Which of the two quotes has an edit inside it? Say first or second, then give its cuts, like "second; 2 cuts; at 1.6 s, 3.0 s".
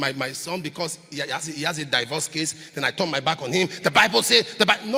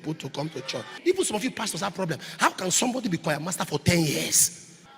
second; 1 cut; at 1.0 s